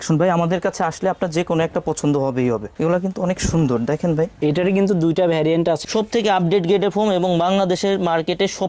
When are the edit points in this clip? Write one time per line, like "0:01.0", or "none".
0:02.7
0:05.8